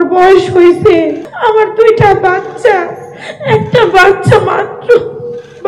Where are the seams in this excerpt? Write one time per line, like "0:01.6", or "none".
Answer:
0:01.3